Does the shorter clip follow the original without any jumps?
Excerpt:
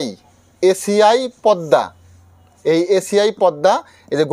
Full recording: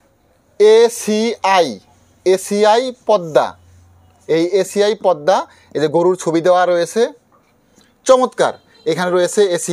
yes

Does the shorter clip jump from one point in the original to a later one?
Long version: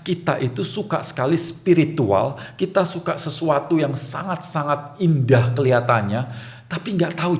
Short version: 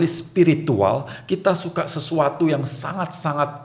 no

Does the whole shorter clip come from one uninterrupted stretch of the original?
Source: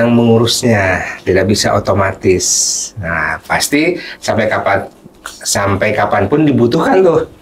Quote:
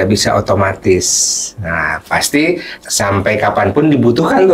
no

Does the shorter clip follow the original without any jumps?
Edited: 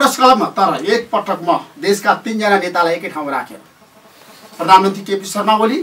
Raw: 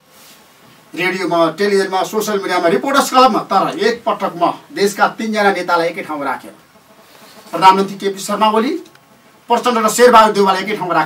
yes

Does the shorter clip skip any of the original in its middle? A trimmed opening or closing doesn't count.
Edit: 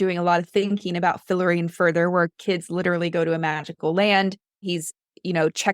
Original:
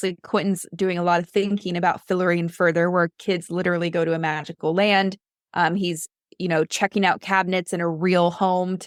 yes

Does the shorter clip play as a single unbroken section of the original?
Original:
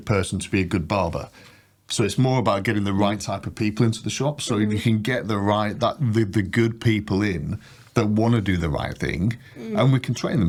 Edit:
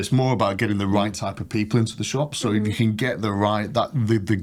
yes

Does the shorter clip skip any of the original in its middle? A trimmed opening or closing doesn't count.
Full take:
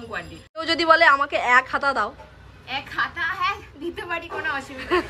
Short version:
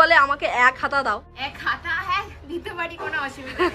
yes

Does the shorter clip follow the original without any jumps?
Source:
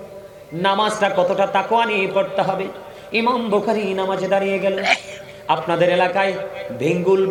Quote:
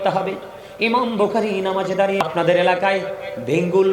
no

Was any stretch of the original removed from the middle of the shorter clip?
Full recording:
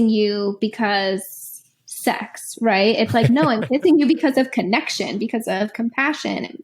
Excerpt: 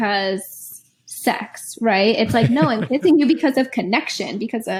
no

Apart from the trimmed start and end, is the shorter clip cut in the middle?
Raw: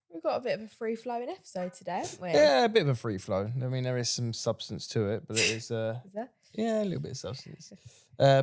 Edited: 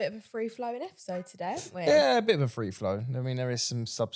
no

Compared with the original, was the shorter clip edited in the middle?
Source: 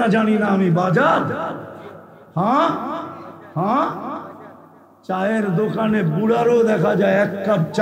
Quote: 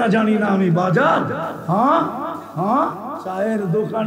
yes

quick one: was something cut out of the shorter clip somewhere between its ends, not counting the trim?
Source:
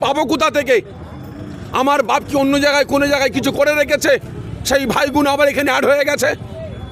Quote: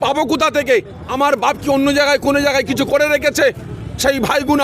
yes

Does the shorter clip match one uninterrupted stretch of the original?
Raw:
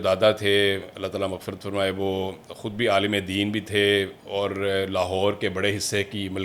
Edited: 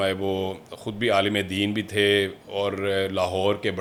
yes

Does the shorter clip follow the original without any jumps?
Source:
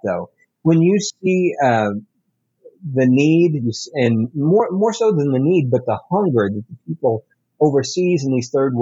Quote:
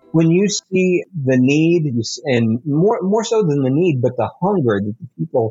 no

